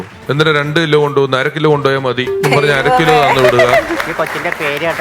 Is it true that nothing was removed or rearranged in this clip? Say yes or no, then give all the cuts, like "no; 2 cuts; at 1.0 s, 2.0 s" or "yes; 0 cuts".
no; 2 cuts; at 2.4 s, 3.9 s